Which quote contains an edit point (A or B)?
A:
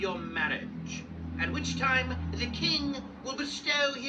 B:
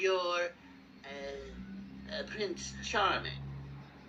A